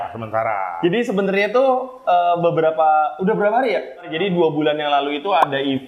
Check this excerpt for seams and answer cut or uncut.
cut